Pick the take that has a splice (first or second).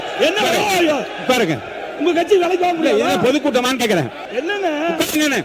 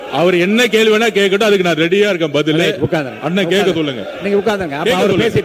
first